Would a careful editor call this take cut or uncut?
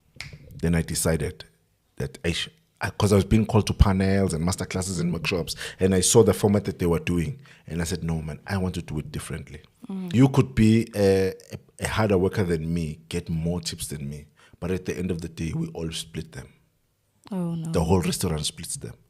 cut